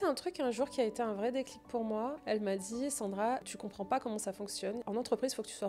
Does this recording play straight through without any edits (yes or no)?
no